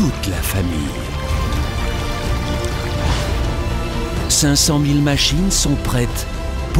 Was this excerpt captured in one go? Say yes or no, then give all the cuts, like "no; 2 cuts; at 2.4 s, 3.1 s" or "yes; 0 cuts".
yes; 0 cuts